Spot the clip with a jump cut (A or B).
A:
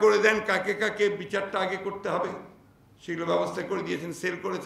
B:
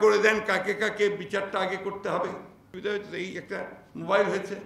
B